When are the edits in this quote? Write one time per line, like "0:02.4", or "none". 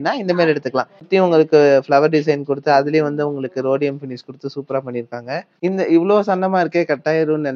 0:01.1
0:05.6